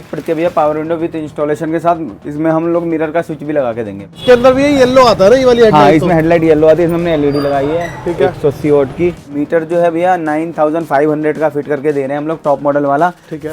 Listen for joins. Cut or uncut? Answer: cut